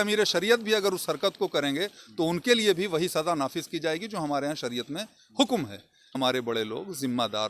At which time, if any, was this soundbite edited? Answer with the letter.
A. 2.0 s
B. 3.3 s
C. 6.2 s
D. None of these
C